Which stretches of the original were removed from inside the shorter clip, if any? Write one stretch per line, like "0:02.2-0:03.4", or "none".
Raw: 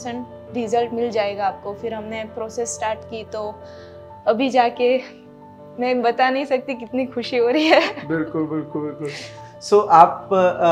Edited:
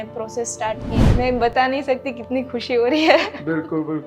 0:03.2-0:05.6